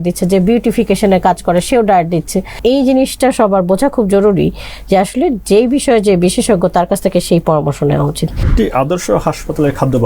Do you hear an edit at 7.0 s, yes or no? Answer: no